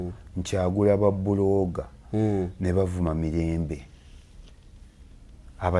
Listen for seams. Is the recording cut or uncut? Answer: uncut